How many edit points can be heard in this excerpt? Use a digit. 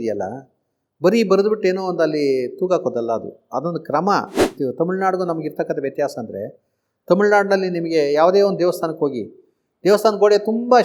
1